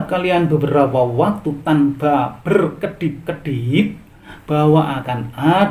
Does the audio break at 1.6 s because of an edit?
no; 1 cut; at 4.3 s

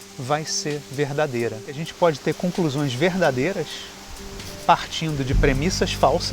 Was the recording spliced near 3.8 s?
no; 1 cut; at 1.9 s

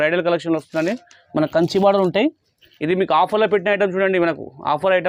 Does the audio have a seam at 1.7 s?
no; 0 cuts

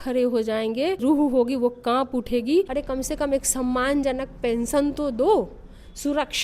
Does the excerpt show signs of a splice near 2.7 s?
yes; 2 cuts; at 1.0 s, 2.7 s

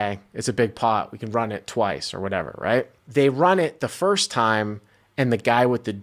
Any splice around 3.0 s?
yes; 1 cut; at 3.0 s

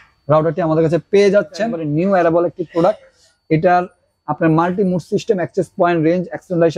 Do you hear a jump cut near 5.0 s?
no; 1 cut; at 1.8 s

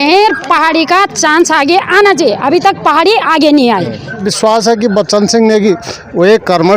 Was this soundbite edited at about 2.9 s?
no; 1 cut; at 4.3 s

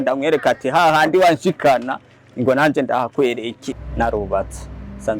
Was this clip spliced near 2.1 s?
no; 1 cut; at 3.8 s

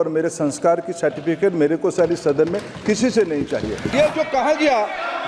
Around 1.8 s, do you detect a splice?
no; 1 cut; at 3.9 s

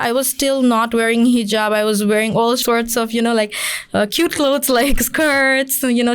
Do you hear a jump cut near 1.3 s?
no; 1 cut; at 2.6 s

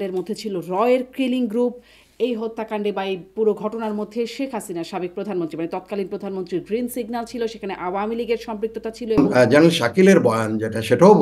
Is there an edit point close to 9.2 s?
yes; 1 cut; at 9.2 s

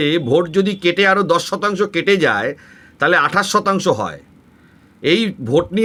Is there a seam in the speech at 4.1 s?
no; 0 cuts

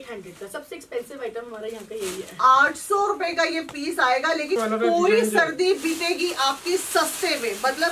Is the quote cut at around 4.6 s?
yes; 1 cut; at 4.6 s

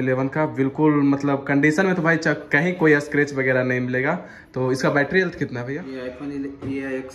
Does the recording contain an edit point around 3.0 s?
no; 1 cut; at 5.8 s

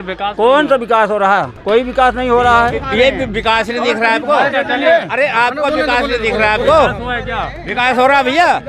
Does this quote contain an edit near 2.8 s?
yes; 1 cut; at 2.8 s

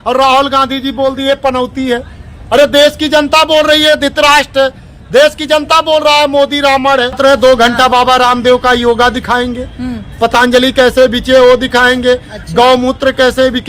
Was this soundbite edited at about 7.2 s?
yes; 1 cut; at 7.2 s

